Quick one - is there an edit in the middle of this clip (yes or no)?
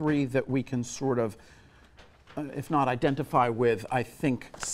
yes